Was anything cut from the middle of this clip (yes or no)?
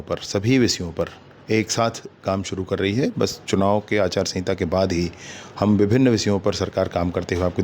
no